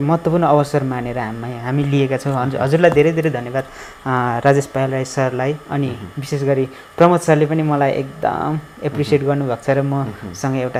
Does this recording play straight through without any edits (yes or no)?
yes